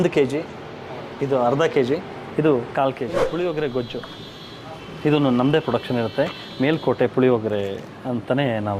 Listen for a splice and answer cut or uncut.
cut